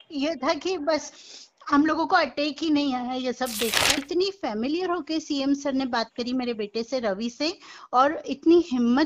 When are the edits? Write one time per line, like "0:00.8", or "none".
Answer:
0:04.0